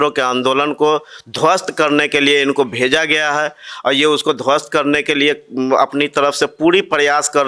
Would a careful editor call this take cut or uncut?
uncut